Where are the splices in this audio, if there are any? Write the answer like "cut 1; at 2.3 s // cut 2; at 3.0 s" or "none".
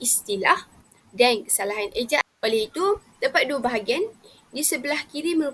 cut 1; at 2.2 s